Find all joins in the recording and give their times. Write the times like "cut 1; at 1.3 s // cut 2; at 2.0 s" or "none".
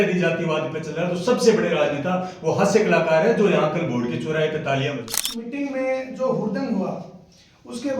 cut 1; at 5.0 s